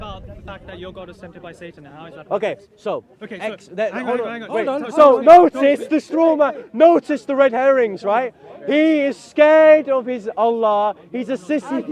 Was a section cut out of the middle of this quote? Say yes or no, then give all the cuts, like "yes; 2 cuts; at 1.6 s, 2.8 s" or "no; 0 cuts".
no; 0 cuts